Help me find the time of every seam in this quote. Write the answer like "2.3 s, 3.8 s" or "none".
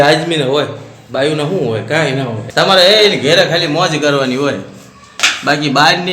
2.4 s